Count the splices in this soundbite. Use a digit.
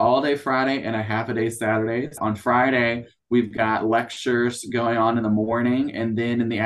1